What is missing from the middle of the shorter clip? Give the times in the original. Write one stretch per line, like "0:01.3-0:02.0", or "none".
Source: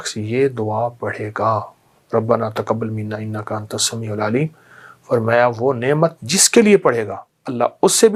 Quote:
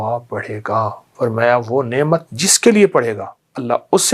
0:01.7-0:04.9